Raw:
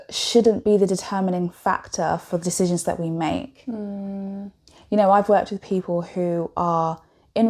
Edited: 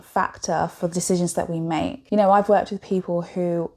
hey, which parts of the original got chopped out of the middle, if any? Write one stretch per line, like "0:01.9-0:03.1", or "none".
0:03.5-0:04.8